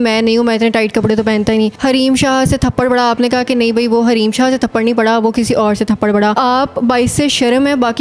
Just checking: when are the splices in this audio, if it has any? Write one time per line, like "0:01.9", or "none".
0:01.8
0:06.3